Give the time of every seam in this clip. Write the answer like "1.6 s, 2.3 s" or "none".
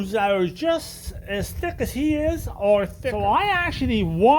3.0 s

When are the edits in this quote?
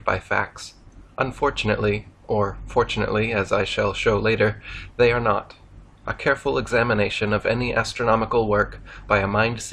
2.0 s

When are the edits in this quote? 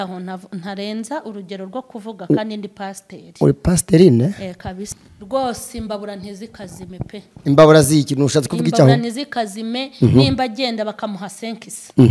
4.9 s

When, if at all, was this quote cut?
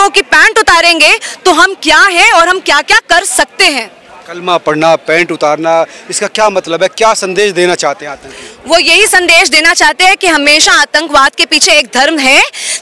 none

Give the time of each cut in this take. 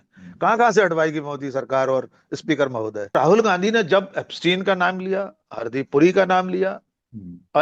3.1 s

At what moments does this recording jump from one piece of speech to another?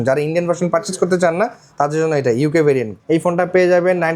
2.9 s

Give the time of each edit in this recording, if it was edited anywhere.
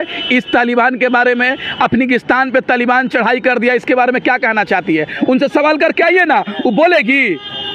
none

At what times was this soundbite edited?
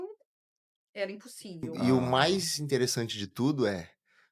1.7 s

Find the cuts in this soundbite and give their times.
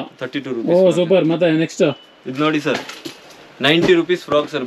none

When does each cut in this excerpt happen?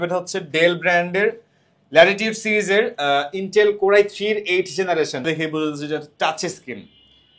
5.3 s

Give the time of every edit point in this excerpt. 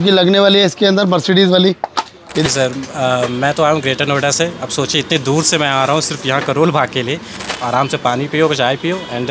2.5 s, 7.5 s

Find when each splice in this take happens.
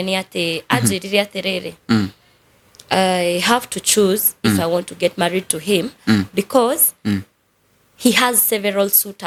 none

